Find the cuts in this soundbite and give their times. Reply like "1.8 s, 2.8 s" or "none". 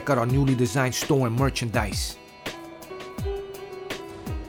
1.9 s